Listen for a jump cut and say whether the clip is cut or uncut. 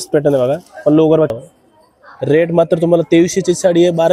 cut